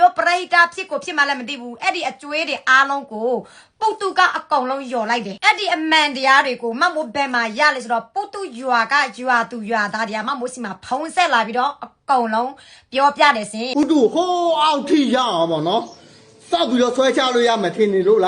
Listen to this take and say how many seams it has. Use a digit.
1